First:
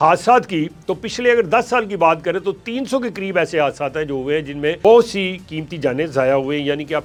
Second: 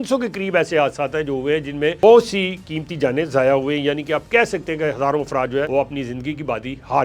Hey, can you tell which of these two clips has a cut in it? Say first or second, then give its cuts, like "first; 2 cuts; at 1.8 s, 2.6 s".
second; 1 cut; at 5.7 s